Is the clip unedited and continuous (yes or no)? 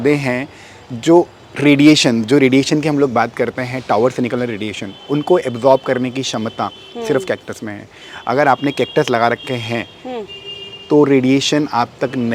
yes